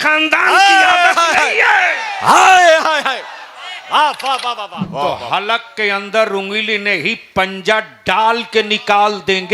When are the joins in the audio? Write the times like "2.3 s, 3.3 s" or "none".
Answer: 4.9 s